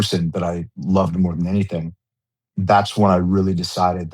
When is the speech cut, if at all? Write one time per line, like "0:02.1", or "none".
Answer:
0:02.3